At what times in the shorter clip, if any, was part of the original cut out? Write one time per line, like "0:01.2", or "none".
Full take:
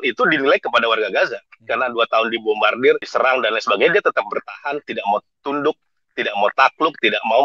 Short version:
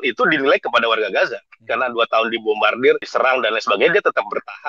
none